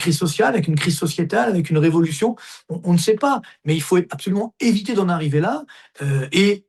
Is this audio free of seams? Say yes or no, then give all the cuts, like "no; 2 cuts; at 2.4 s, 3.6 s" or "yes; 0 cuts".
yes; 0 cuts